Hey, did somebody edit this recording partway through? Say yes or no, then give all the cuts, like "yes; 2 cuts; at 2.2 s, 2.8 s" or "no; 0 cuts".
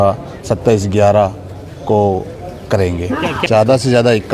yes; 1 cut; at 3.4 s